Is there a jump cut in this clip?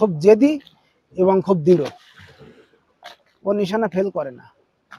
no; 0 cuts

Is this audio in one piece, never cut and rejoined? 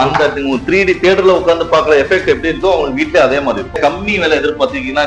no; 1 cut; at 3.8 s

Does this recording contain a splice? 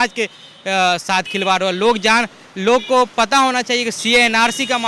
no; 0 cuts

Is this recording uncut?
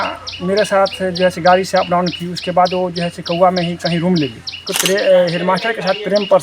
no; 1 cut; at 4.7 s

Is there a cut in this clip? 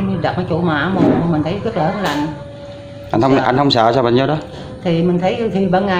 no; 0 cuts

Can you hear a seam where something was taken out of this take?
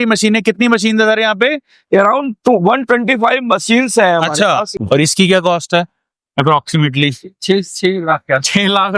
yes; 1 cut; at 4.7 s

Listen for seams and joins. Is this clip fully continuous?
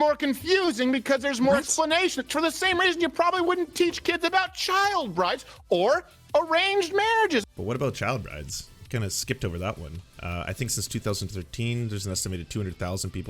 no; 2 cuts; at 7.4 s, 10.0 s

